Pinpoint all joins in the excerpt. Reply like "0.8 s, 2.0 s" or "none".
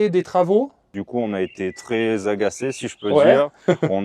1.0 s